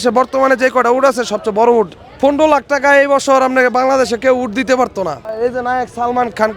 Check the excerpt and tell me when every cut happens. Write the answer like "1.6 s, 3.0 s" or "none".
2.0 s, 5.4 s